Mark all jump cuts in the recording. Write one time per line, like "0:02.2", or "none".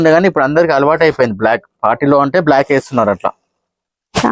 none